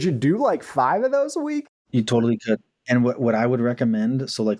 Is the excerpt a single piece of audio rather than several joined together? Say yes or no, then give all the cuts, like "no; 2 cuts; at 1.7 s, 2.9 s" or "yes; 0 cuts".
no; 1 cut; at 1.9 s